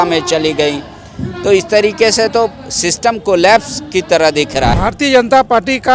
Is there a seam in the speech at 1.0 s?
no; 1 cut; at 4.8 s

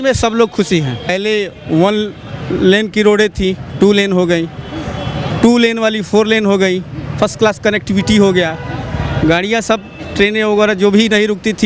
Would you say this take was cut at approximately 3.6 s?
no; 1 cut; at 1.1 s

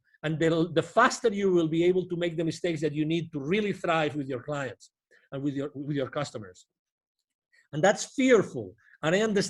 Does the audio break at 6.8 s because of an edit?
no; 0 cuts

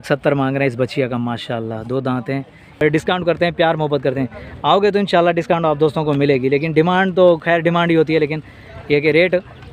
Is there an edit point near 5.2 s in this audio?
no; 1 cut; at 2.6 s

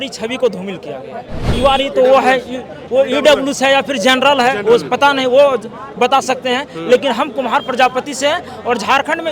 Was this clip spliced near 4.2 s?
no; 1 cut; at 1.5 s

